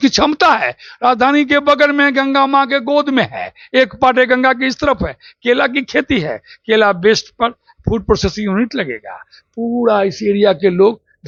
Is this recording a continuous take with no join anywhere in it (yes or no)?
yes